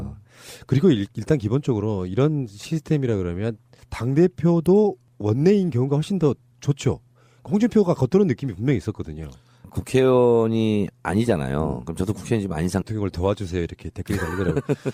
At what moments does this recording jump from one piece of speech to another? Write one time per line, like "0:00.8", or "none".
none